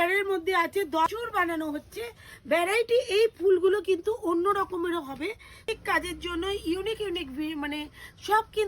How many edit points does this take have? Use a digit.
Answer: 2